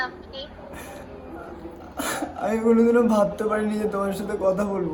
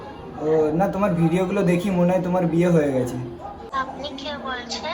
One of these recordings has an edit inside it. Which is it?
second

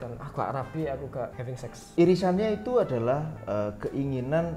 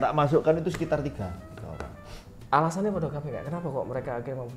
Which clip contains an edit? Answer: first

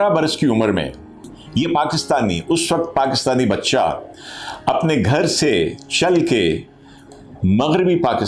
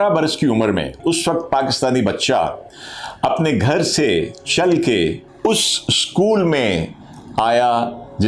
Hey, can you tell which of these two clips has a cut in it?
second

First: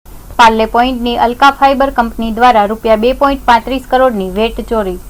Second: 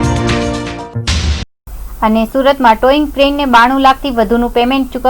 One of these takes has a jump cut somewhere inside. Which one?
second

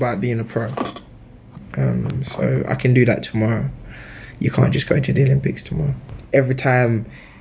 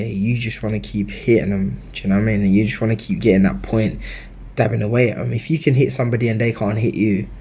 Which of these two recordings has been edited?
first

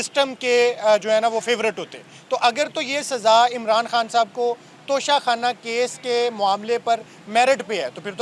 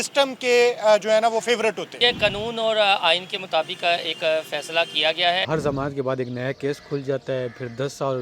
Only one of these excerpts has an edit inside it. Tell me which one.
second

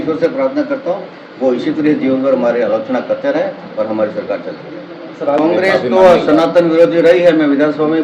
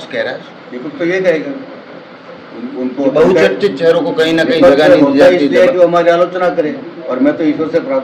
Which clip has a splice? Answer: first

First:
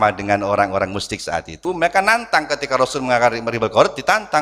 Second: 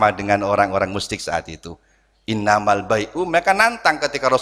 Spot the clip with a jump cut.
first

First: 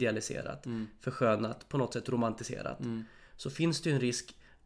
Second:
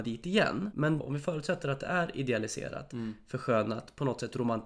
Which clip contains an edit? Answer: second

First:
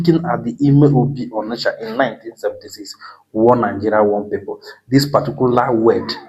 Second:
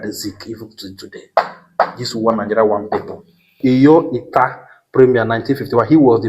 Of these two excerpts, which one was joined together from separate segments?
second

